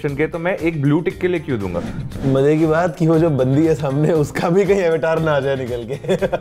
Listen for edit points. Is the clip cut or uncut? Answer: cut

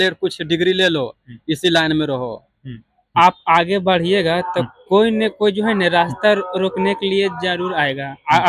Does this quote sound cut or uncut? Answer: cut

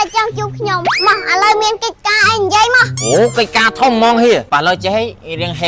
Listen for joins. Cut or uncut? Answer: cut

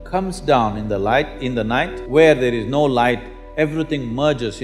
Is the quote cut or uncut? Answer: cut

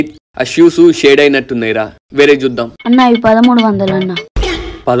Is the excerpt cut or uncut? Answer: cut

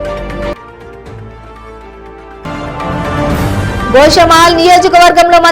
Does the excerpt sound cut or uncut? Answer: uncut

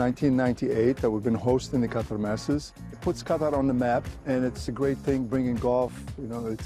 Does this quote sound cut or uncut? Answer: cut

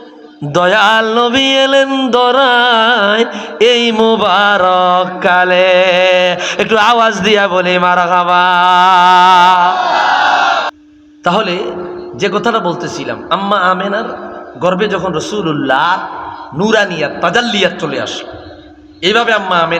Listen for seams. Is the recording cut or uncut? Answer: cut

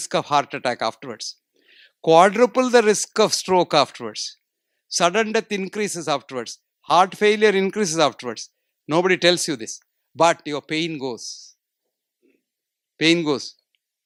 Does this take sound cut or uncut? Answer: uncut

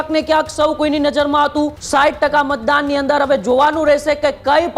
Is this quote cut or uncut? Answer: cut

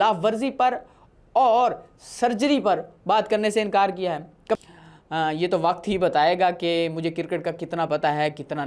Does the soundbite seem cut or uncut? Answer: cut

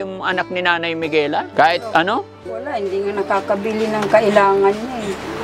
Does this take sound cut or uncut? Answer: cut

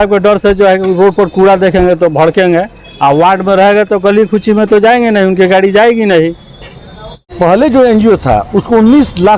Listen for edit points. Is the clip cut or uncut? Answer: cut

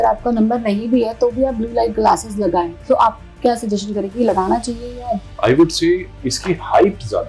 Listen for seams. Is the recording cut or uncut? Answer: cut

